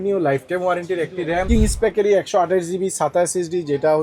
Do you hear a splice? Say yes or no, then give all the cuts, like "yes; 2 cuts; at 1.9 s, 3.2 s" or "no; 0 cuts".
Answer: yes; 1 cut; at 1.5 s